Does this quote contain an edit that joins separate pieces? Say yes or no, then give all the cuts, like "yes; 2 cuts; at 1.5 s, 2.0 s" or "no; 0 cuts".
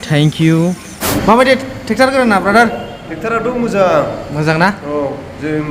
yes; 1 cut; at 0.9 s